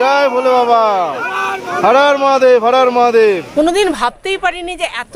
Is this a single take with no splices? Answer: no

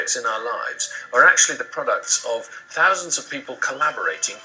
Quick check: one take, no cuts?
yes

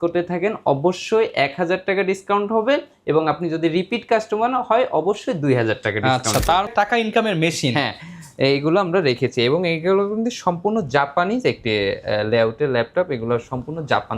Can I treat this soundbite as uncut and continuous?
no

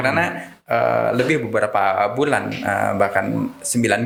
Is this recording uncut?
yes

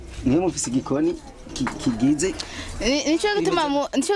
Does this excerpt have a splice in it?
no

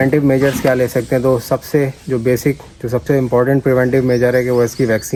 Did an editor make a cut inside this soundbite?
no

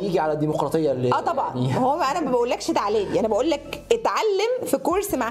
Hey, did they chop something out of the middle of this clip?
no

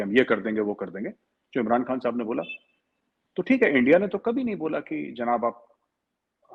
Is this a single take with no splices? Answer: yes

